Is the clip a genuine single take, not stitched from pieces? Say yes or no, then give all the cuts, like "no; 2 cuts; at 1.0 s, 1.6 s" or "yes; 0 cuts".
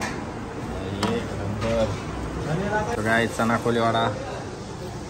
no; 1 cut; at 2.9 s